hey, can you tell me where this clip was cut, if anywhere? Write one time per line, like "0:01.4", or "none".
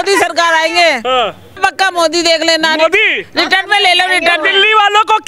none